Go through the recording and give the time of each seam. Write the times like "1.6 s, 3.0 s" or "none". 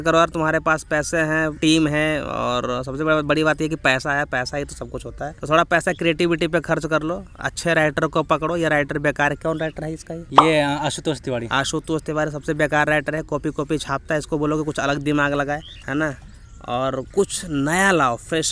none